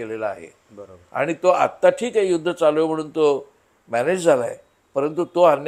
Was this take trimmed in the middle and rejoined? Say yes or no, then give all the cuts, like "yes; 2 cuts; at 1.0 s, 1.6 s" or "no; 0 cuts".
no; 0 cuts